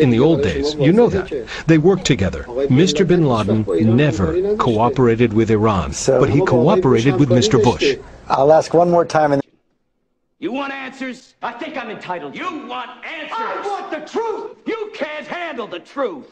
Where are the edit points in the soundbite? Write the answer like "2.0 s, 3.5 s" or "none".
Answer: 9.5 s, 14.5 s